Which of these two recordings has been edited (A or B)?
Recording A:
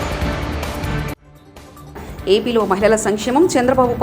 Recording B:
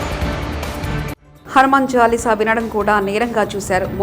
B